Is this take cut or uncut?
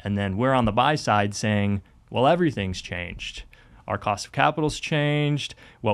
uncut